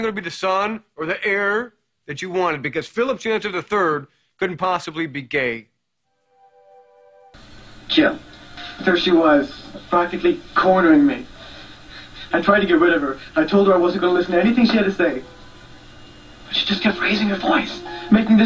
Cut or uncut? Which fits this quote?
uncut